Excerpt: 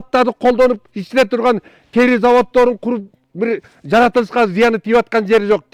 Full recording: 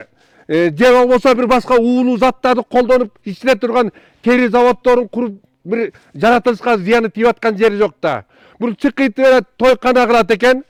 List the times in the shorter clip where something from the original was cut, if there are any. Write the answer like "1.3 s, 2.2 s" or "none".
none